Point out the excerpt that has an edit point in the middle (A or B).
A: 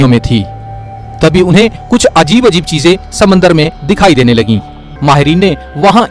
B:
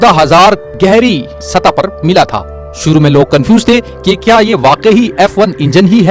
A